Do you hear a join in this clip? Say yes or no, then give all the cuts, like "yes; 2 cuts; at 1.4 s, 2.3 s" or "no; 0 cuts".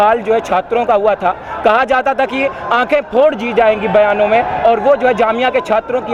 no; 0 cuts